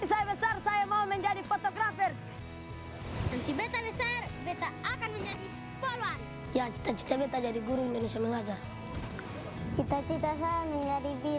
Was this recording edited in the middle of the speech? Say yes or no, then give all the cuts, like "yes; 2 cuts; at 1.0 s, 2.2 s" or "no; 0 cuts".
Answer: no; 0 cuts